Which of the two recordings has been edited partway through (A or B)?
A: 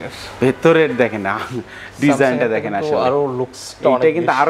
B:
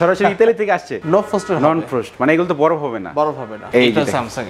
B